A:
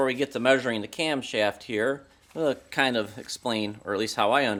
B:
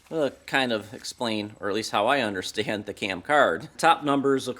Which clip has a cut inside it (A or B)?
B